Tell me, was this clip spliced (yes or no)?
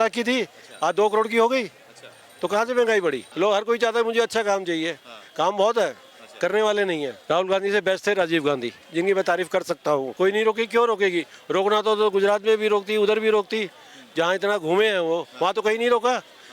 yes